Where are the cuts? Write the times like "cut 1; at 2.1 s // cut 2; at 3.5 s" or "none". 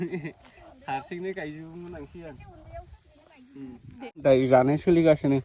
cut 1; at 4.2 s